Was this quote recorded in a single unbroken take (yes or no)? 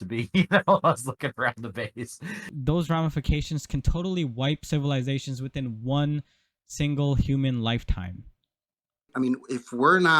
no